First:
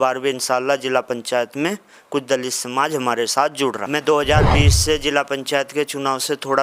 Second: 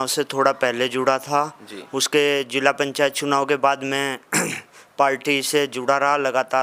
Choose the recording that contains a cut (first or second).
first